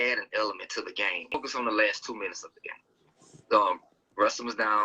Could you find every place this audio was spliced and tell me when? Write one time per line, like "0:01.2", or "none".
0:01.5

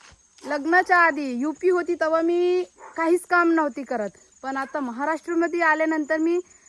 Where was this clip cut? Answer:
none

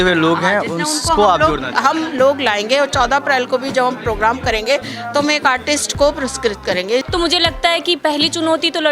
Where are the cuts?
0:07.1

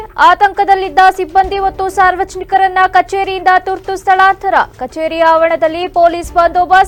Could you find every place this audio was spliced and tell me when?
none

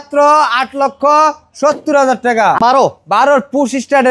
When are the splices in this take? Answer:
0:02.6

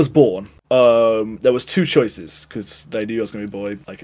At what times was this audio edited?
none

